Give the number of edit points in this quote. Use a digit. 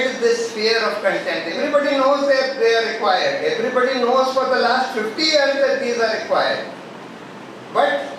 1